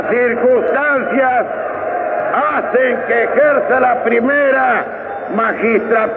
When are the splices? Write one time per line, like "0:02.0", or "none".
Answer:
none

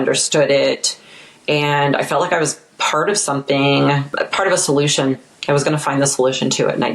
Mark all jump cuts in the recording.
0:04.1

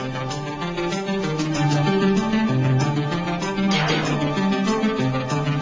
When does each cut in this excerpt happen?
none

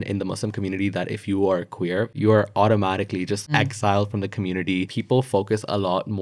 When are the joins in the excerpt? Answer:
0:02.1
0:03.5
0:04.9

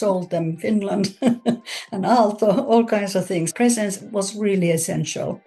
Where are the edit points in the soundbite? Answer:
none

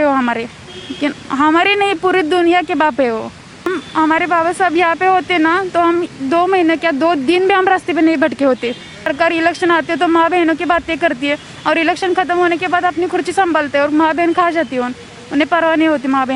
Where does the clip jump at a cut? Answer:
0:03.8
0:09.1

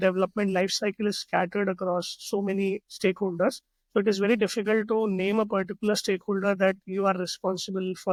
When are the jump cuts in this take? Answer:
none

